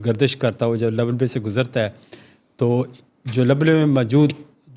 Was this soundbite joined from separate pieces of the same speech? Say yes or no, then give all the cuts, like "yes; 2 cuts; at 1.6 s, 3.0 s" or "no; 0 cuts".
no; 0 cuts